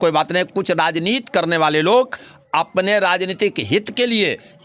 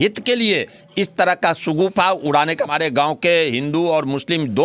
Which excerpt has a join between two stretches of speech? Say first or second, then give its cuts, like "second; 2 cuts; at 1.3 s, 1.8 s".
second; 1 cut; at 2.7 s